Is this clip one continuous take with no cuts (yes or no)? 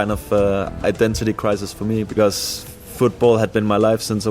no